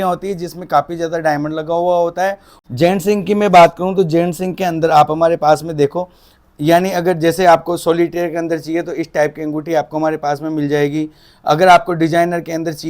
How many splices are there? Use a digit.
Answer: 1